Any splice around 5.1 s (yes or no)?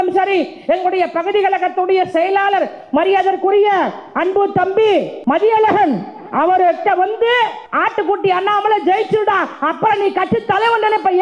yes